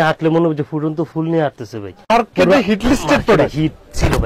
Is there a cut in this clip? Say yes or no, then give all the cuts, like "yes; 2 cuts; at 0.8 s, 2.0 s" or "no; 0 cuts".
yes; 1 cut; at 2.1 s